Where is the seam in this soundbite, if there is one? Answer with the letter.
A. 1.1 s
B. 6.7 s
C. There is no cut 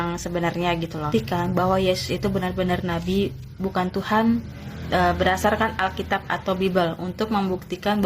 A